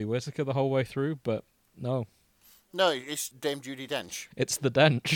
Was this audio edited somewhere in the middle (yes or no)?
no